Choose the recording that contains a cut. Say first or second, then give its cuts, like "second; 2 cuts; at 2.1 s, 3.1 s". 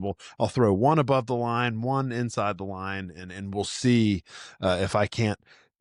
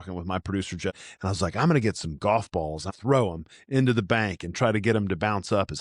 second; 2 cuts; at 1.0 s, 2.8 s